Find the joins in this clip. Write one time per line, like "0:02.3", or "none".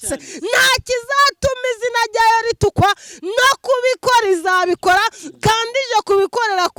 none

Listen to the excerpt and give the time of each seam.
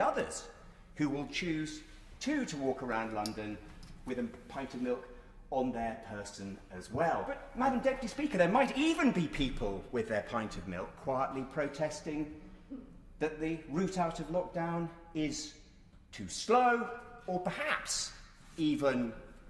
none

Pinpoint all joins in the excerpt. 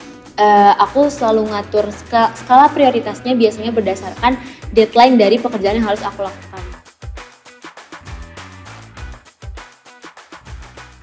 0:06.7

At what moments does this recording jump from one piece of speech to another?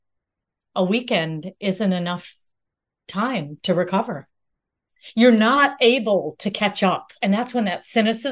0:07.1

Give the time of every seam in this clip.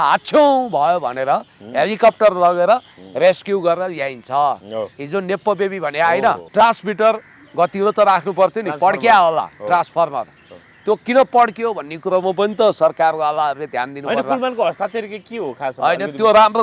0:06.4

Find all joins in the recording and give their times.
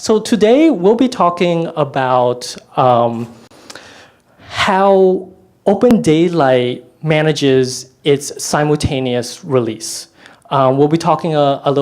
0:02.6

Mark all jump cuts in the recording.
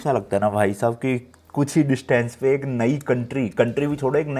none

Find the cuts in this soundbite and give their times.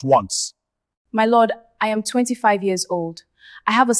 0:01.0

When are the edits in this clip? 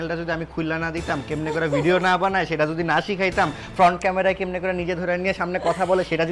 none

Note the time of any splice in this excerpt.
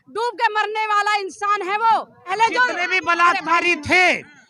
0:02.3

